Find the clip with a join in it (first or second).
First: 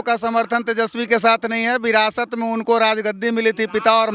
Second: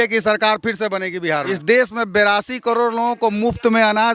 second